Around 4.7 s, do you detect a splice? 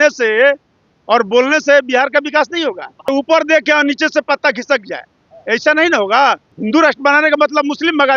no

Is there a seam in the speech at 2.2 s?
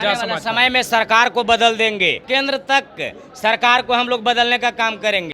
yes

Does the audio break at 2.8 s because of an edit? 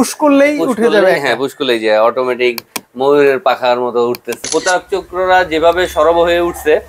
no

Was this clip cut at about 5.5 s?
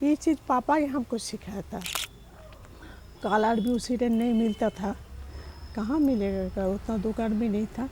no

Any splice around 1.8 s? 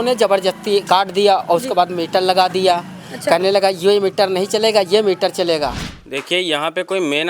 no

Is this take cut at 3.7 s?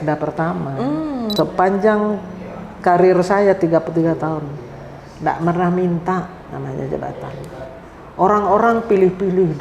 no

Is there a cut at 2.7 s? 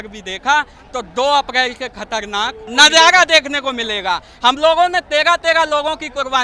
yes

